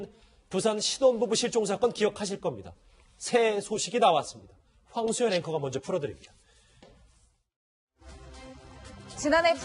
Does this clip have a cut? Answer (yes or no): no